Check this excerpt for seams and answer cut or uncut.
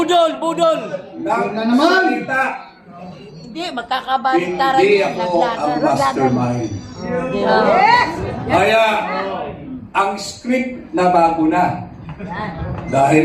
uncut